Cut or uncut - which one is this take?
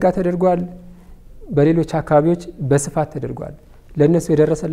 uncut